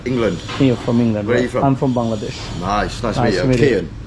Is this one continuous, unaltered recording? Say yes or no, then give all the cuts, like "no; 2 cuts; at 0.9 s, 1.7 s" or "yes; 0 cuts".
yes; 0 cuts